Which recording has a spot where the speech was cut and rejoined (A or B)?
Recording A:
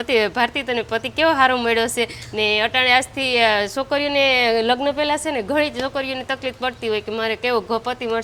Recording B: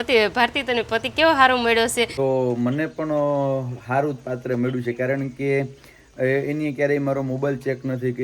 B